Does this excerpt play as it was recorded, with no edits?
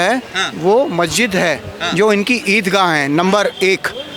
yes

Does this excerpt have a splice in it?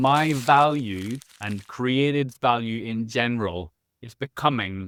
no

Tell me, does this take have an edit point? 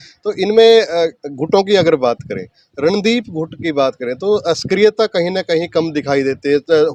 no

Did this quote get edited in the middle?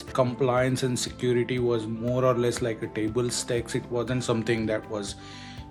no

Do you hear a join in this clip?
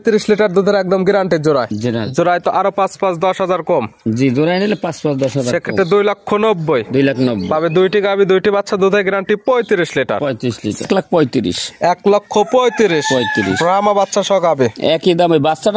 yes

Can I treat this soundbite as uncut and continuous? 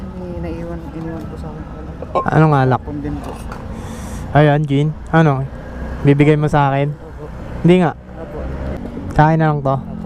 no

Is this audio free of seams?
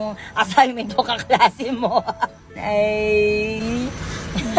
no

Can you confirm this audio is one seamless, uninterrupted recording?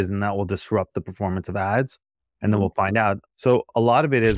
no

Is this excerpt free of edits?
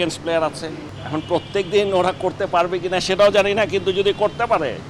no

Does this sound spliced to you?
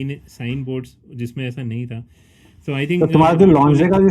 no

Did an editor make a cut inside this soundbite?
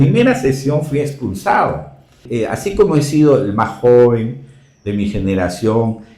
yes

